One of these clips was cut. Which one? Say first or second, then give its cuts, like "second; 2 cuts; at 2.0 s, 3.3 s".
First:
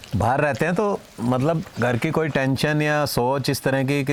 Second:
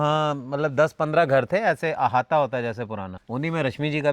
second; 1 cut; at 3.1 s